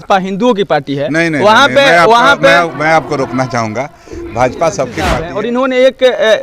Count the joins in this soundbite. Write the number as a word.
one